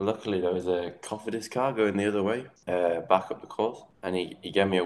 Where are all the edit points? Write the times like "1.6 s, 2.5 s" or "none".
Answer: 2.5 s, 3.9 s